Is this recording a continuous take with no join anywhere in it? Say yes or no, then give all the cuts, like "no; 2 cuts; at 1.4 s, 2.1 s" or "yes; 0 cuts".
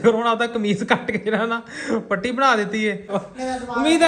no; 1 cut; at 3.2 s